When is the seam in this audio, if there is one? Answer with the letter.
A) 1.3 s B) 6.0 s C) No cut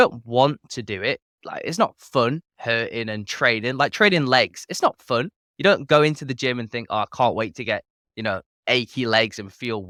C